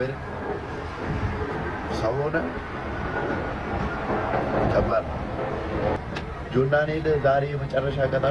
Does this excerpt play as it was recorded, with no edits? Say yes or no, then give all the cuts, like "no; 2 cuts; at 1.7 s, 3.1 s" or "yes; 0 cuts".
no; 1 cut; at 6.0 s